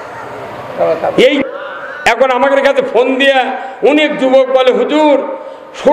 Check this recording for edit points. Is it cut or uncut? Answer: cut